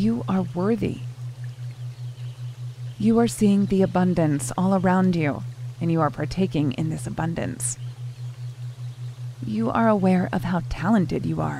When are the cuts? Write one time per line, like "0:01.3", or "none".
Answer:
0:07.6
0:09.2